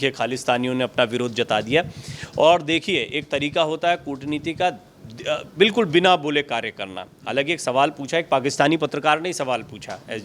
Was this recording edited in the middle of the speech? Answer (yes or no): no